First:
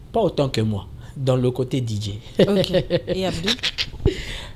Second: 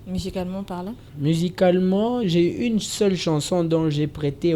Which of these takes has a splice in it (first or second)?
second